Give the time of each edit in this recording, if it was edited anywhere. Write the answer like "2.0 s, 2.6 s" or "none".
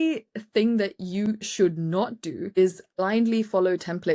2.6 s